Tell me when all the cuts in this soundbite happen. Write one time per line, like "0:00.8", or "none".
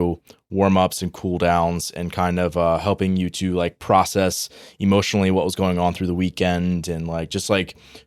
none